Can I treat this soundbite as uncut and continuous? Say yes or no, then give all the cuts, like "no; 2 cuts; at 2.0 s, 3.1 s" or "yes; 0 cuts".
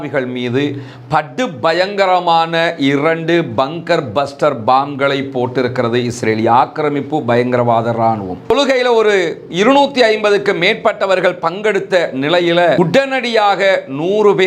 no; 1 cut; at 8.4 s